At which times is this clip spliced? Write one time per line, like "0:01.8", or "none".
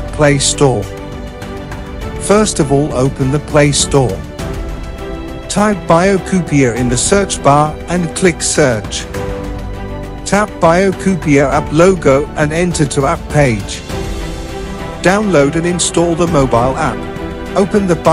none